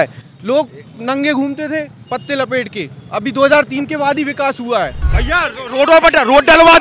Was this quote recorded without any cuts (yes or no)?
no